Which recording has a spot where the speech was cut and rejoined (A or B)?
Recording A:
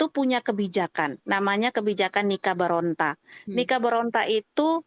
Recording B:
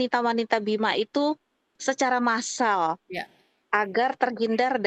A